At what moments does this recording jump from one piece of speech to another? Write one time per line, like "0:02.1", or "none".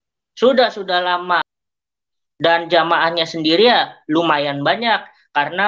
0:01.5